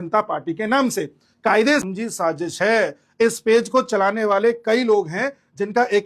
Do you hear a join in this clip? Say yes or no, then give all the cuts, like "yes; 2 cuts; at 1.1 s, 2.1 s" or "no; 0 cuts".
yes; 1 cut; at 1.8 s